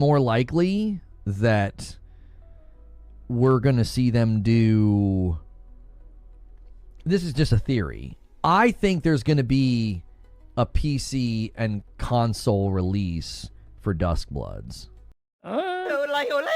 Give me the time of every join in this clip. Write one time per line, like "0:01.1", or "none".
0:15.6